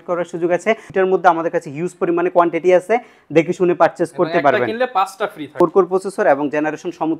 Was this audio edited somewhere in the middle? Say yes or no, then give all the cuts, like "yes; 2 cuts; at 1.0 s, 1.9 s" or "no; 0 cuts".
yes; 2 cuts; at 0.9 s, 5.5 s